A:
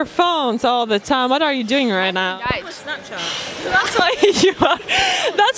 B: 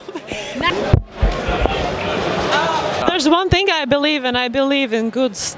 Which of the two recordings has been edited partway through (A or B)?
B